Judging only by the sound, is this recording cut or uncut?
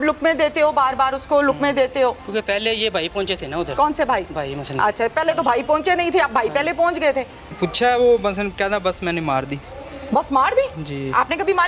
cut